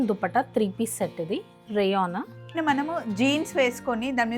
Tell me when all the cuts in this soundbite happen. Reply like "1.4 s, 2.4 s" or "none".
2.6 s